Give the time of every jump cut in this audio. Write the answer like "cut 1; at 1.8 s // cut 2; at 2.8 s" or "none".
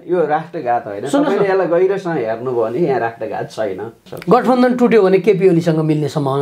cut 1; at 4.1 s